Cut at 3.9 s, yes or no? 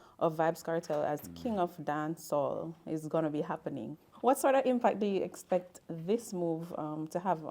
yes